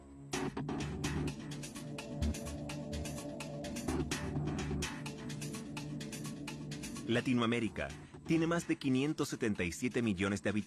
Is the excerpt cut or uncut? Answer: cut